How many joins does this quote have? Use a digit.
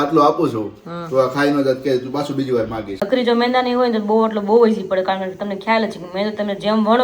1